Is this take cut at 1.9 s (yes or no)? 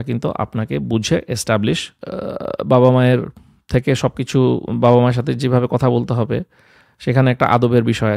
yes